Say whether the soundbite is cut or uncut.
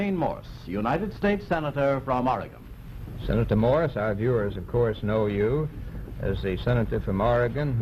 uncut